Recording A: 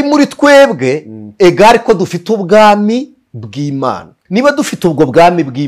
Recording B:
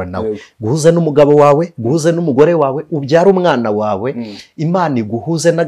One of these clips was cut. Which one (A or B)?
A